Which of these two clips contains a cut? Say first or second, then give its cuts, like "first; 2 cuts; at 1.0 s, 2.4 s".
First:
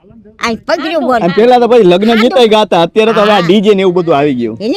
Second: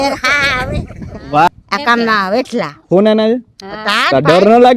second; 1 cut; at 1.5 s